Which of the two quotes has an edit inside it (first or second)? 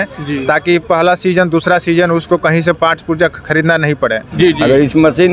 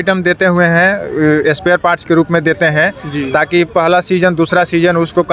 first